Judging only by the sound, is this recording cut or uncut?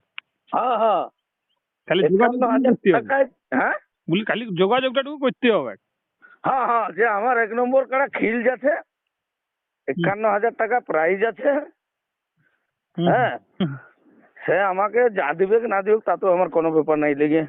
uncut